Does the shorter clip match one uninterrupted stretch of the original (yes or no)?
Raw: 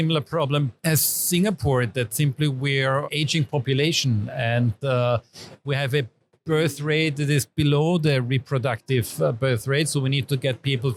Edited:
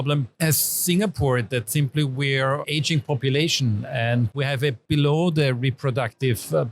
no